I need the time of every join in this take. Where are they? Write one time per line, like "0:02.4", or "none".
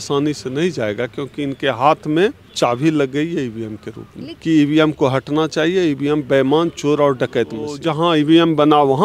0:02.4
0:04.3
0:07.8